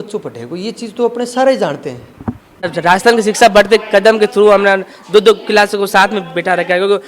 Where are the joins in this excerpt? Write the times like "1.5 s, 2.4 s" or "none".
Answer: 2.7 s

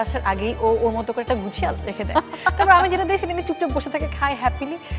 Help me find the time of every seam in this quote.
none

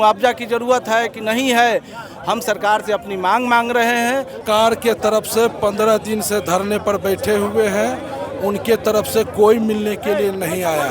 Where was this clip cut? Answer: 4.4 s

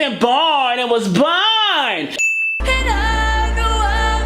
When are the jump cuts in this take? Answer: 2.2 s

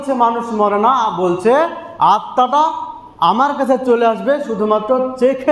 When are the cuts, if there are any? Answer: none

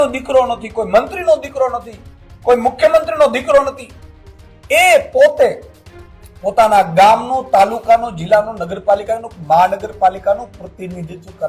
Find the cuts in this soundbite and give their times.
none

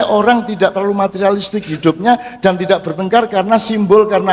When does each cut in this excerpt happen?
none

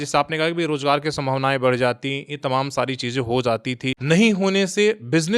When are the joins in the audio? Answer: 3.9 s

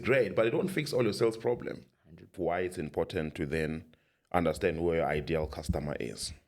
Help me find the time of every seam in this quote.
2.3 s

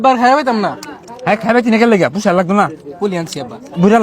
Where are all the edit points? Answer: none

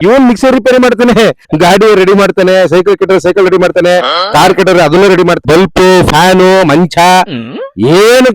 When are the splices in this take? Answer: 1.4 s, 5.4 s

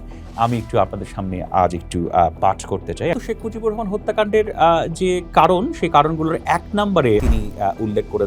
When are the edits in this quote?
3.1 s, 7.2 s

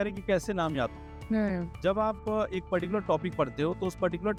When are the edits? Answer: none

